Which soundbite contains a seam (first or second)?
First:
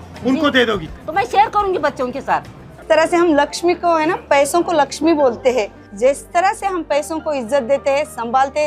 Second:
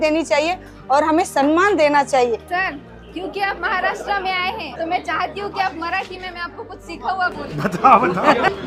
first